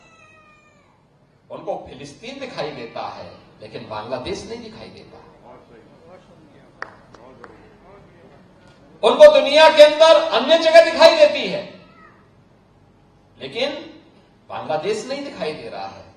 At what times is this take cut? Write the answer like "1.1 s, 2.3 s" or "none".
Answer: none